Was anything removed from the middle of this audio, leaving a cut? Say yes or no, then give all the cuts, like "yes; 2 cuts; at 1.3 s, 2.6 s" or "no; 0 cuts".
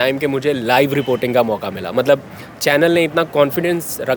no; 0 cuts